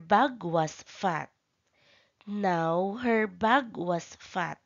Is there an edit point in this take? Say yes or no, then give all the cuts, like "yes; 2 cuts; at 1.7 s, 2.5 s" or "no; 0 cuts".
yes; 1 cut; at 3.2 s